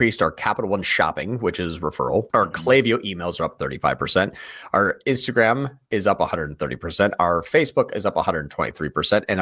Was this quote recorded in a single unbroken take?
no; 1 cut; at 2.3 s

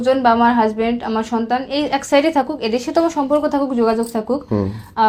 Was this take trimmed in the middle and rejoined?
no; 0 cuts

